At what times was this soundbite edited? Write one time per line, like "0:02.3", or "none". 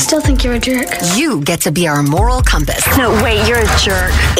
none